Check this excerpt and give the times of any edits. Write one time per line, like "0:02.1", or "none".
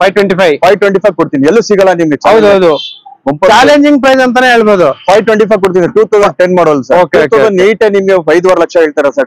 none